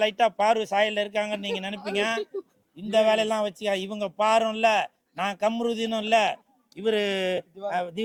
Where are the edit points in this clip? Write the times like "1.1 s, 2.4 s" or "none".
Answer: none